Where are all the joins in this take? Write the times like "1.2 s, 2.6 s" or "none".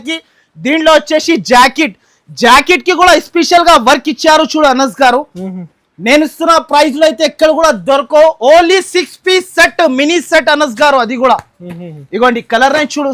none